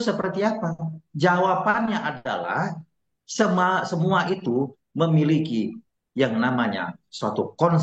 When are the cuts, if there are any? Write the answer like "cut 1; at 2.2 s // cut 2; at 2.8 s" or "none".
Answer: none